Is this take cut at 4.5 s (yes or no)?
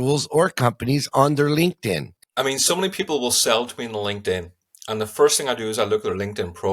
no